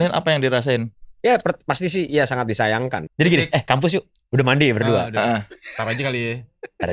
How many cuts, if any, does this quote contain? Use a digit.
1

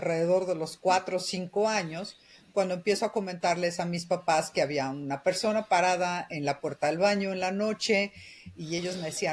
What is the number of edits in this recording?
0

